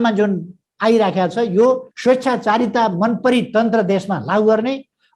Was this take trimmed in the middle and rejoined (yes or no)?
yes